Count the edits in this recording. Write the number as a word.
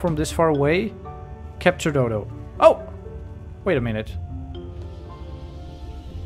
zero